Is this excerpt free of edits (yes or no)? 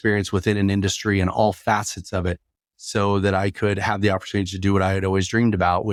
yes